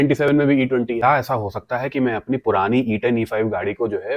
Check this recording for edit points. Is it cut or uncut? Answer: cut